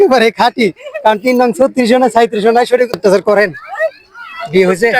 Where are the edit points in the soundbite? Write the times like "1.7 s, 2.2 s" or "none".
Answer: 2.9 s